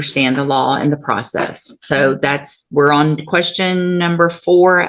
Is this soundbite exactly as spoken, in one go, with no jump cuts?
yes; 0 cuts

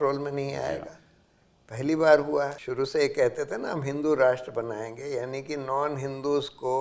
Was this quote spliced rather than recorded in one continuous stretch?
yes; 1 cut; at 2.6 s

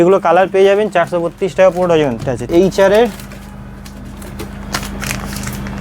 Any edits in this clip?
yes; 1 cut; at 2.4 s

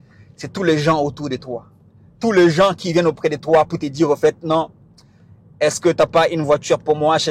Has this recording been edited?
no; 0 cuts

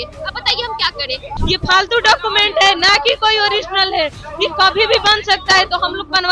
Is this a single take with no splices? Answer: no; 1 cut; at 1.3 s

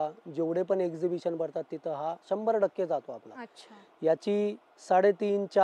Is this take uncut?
yes; 0 cuts

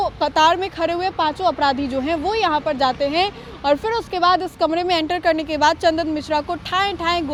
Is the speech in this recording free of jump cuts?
yes; 0 cuts

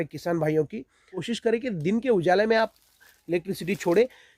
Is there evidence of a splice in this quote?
yes; 1 cut; at 1.3 s

